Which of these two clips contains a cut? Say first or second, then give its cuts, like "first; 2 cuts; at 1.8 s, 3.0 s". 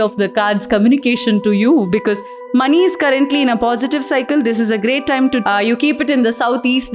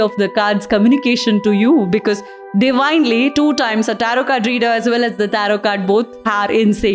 first; 2 cuts; at 2.4 s, 5.4 s